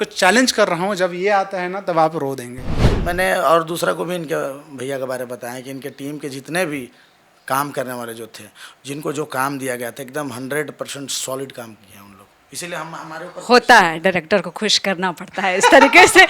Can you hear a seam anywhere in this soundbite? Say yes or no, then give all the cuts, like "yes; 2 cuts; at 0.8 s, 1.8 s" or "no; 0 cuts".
yes; 1 cut; at 2.8 s